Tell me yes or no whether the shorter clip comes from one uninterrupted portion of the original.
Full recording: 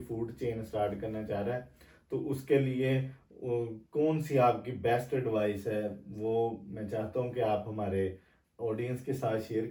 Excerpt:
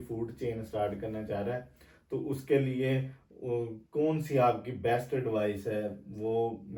yes